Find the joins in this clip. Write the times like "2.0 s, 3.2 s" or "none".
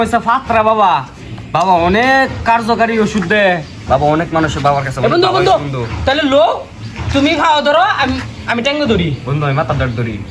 none